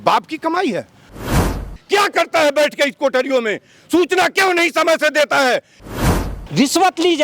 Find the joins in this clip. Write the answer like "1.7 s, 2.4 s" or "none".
1.3 s, 5.9 s

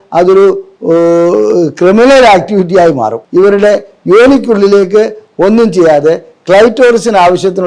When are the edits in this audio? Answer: 3.2 s

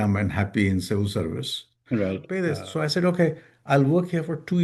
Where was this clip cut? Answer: 2.3 s

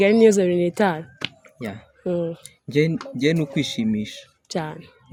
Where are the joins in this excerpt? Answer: none

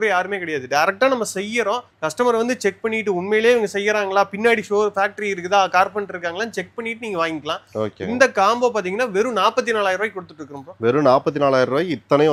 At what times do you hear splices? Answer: none

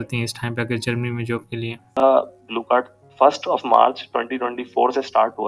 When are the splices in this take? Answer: 1.9 s

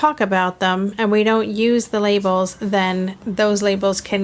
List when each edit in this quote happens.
3.2 s

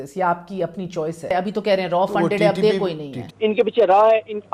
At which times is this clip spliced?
1.3 s, 3.3 s

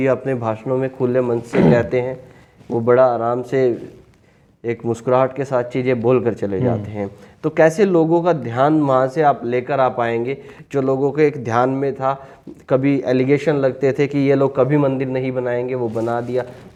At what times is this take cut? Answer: none

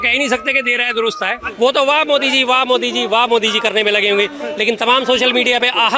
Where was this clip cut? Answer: 1.4 s

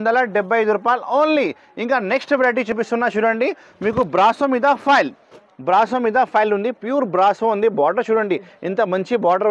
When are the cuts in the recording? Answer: none

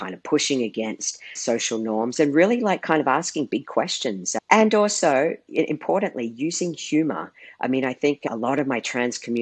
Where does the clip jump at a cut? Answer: 8.3 s

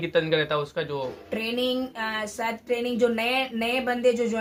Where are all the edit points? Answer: none

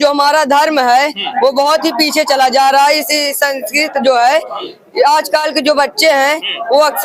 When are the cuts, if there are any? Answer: none

